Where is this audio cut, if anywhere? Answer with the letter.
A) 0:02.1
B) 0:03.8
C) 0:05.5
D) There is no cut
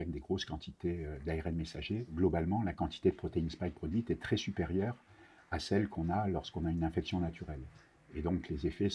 A